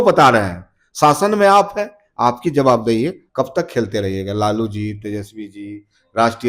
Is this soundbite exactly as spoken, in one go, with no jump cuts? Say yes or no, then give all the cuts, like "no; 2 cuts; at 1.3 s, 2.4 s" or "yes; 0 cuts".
no; 1 cut; at 3.2 s